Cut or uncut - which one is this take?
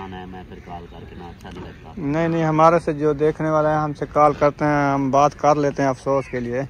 uncut